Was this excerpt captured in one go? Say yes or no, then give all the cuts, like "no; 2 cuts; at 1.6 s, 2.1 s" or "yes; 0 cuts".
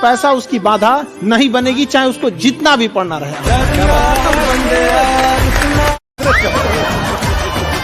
no; 1 cut; at 6.1 s